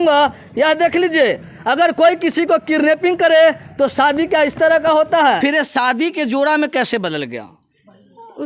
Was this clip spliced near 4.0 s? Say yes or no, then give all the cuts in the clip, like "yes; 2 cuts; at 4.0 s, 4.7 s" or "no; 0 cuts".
no; 1 cut; at 5.4 s